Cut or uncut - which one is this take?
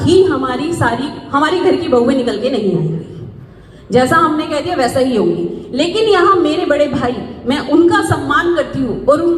uncut